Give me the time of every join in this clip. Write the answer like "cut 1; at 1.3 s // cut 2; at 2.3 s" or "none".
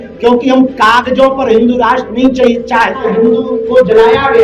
cut 1; at 3.1 s

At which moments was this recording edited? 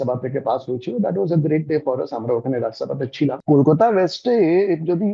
cut 1; at 3.4 s

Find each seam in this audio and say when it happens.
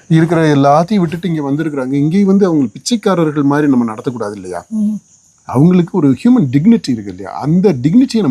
none

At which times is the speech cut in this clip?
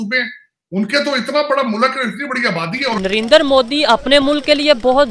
cut 1; at 2.9 s

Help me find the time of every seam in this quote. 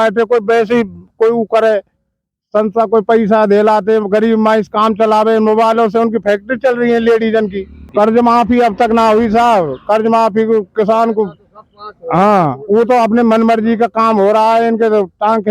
cut 1; at 7.9 s

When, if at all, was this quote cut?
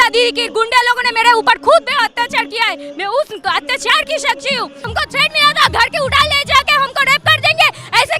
cut 1; at 4.8 s

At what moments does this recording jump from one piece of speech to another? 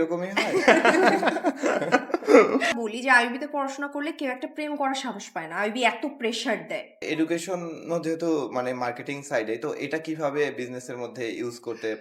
cut 1; at 2.7 s // cut 2; at 7.0 s

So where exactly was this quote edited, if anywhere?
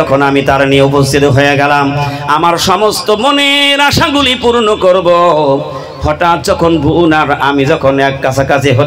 none

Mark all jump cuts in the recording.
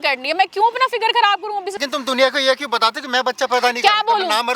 cut 1; at 1.7 s

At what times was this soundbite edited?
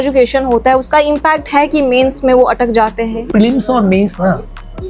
cut 1; at 3.3 s

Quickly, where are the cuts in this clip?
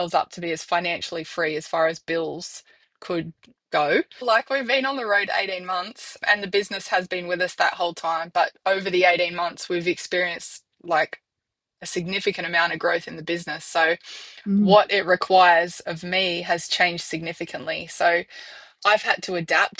cut 1; at 4.2 s

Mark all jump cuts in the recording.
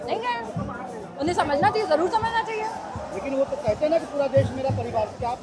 none

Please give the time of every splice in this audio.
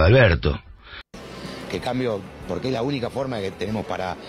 cut 1; at 1.1 s

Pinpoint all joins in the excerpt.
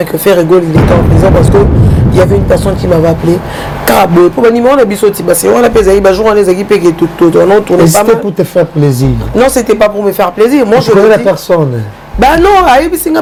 none

